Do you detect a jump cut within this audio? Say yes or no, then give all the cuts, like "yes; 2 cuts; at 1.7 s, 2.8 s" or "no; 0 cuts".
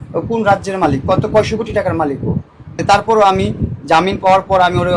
yes; 1 cut; at 2.8 s